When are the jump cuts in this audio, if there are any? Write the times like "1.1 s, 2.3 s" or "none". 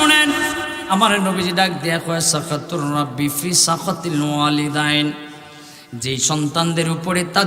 0.9 s